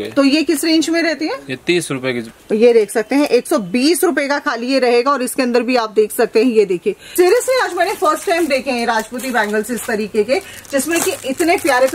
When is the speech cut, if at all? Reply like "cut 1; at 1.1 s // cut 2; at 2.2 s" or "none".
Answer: cut 1; at 2.3 s // cut 2; at 7.0 s